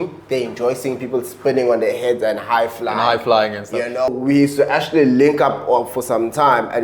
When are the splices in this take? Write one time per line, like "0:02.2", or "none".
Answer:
0:04.1